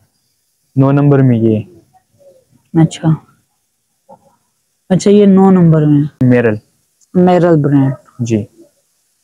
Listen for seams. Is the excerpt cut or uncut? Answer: cut